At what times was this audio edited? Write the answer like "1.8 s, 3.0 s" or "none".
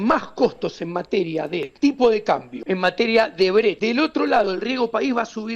1.7 s, 2.5 s, 3.8 s